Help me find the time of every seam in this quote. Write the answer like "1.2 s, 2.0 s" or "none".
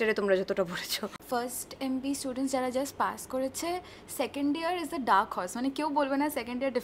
1.1 s